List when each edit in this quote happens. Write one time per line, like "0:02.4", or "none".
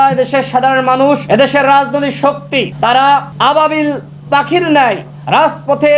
0:01.2
0:02.7
0:03.3